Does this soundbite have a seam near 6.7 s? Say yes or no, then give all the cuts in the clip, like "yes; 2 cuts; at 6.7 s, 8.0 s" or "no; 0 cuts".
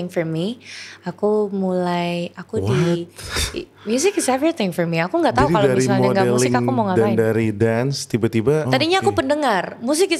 no; 1 cut; at 8.7 s